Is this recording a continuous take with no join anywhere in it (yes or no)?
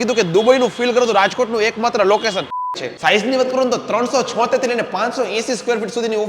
no